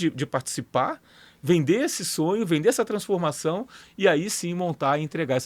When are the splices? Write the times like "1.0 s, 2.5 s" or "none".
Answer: none

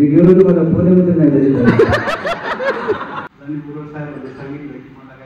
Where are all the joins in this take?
3.2 s

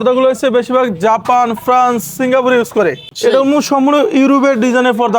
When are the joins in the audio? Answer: 3.1 s

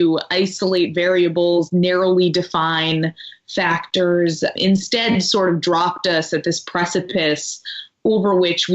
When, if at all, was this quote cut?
4.6 s

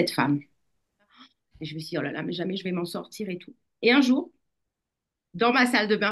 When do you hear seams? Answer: 1.1 s

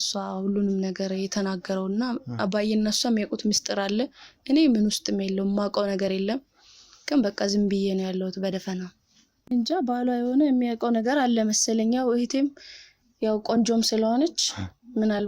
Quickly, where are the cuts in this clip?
9.5 s

